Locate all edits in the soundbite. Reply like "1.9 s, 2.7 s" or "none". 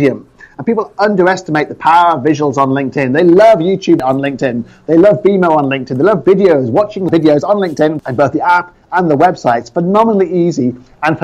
4.0 s, 7.1 s, 8.0 s